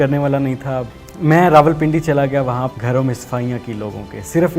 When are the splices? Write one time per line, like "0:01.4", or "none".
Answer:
0:00.9
0:02.7